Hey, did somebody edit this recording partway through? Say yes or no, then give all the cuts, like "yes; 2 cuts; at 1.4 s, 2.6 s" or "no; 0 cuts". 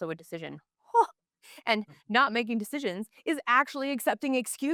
no; 0 cuts